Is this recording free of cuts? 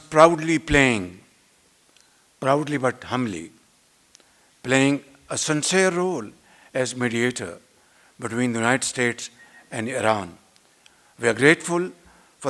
yes; 0 cuts

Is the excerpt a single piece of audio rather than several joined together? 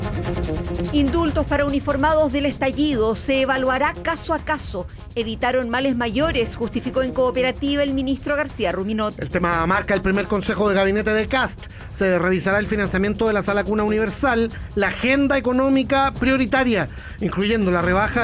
no; 1 cut; at 0.9 s

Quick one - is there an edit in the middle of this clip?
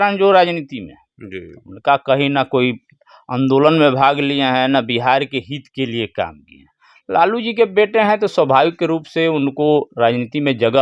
no; 0 cuts

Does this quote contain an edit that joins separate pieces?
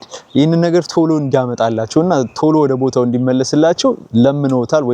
no; 0 cuts

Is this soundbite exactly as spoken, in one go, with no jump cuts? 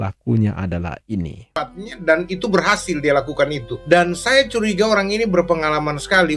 no; 1 cut; at 1.6 s

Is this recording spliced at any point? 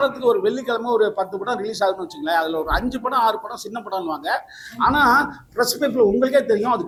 no; 0 cuts

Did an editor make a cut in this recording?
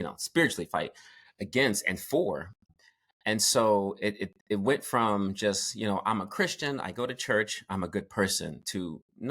yes; 1 cut; at 2.6 s

